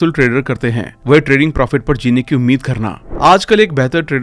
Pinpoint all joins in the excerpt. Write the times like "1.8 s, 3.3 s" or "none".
3.0 s